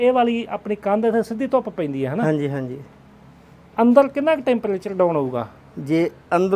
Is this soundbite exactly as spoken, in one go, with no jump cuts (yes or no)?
yes